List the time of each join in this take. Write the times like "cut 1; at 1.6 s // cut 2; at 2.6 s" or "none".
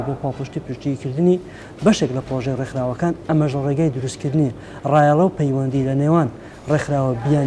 none